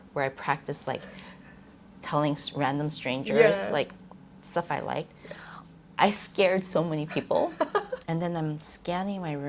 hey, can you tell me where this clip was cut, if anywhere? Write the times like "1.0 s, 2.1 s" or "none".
8.0 s

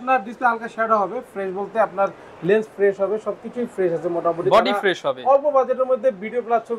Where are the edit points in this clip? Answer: none

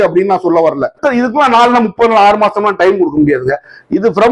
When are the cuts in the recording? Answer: 1.0 s

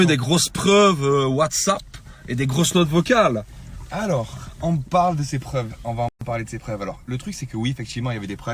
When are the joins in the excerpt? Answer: none

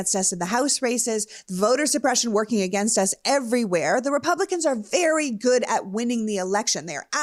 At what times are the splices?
none

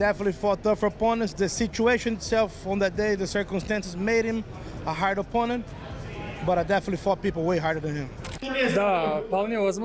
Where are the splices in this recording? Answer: 8.2 s

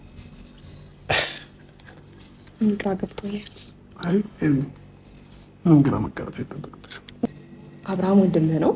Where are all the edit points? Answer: 7.2 s

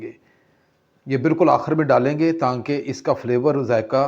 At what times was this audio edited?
none

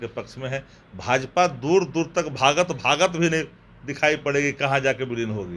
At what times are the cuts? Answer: none

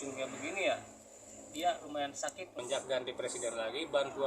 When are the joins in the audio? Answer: 2.6 s

